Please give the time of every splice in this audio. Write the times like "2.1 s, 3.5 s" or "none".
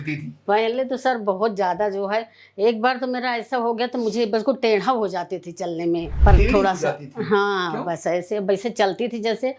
6.1 s